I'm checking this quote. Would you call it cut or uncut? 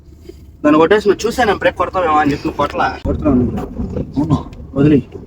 cut